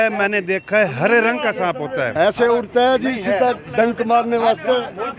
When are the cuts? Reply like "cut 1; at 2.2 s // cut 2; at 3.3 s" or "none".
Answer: cut 1; at 2.1 s